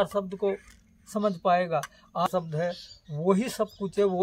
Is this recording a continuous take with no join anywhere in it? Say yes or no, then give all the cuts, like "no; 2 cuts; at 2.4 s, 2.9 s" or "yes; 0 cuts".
no; 1 cut; at 2.3 s